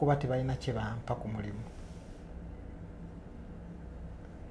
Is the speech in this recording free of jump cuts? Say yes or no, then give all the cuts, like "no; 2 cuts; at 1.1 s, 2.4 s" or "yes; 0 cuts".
yes; 0 cuts